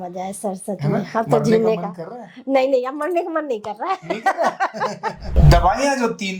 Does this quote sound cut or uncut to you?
cut